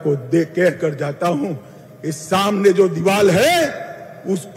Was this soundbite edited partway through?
no; 0 cuts

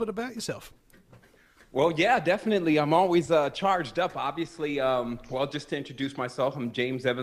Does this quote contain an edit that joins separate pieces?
no; 0 cuts

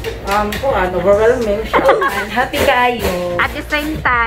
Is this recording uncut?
no; 1 cut; at 2.2 s

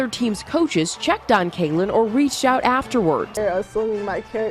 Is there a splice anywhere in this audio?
yes; 1 cut; at 3.3 s

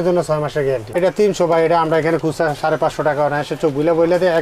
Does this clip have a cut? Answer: yes; 1 cut; at 1.0 s

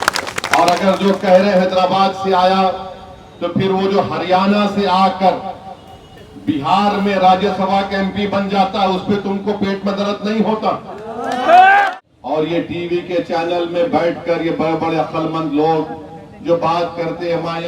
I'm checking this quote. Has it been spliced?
yes; 1 cut; at 11.9 s

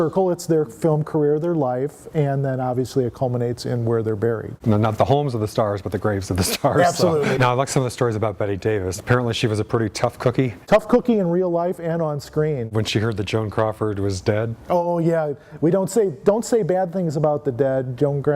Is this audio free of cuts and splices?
no; 4 cuts; at 4.6 s, 7.4 s, 9.0 s, 12.7 s

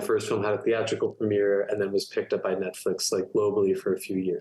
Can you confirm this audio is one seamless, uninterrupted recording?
yes; 0 cuts

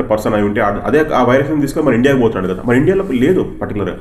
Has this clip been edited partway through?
no; 0 cuts

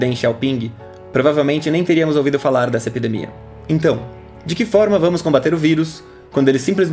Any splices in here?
no; 0 cuts

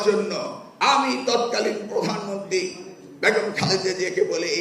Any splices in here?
no; 0 cuts

